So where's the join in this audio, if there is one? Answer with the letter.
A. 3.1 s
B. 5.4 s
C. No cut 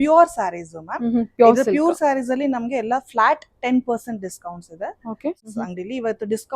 B